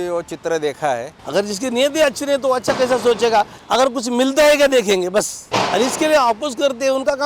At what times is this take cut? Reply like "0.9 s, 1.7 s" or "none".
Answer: 1.3 s, 3.6 s, 5.4 s